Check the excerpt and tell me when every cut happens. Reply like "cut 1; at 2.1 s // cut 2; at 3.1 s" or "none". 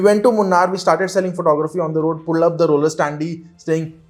none